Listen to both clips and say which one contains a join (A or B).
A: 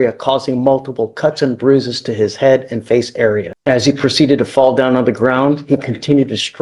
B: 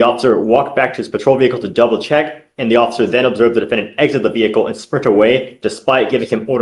A